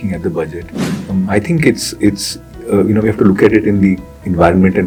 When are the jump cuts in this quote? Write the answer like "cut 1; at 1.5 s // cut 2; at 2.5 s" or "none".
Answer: none